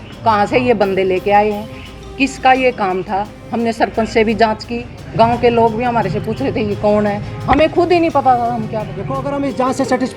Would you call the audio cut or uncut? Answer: cut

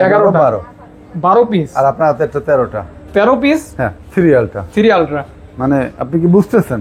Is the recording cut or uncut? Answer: uncut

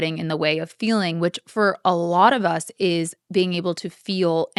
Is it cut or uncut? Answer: uncut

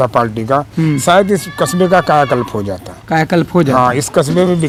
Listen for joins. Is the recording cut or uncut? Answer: uncut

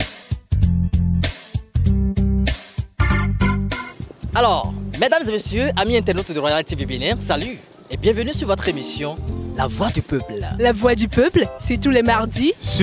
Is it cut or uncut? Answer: cut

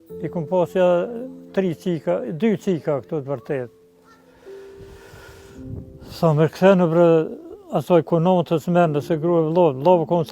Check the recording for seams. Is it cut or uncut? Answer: cut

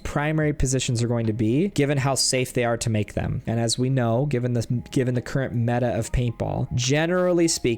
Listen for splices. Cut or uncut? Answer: cut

